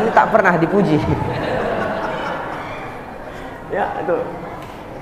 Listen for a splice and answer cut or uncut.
uncut